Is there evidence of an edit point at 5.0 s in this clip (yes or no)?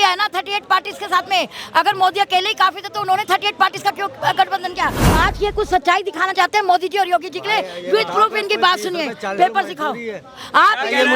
yes